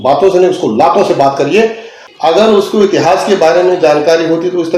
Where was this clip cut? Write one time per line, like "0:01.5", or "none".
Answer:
0:02.0